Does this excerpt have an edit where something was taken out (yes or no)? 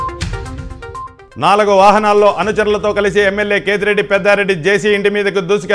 yes